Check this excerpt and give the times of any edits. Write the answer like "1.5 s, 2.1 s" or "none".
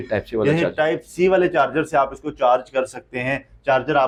none